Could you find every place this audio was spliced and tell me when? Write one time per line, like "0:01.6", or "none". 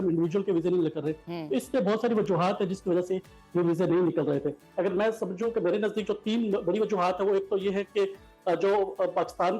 none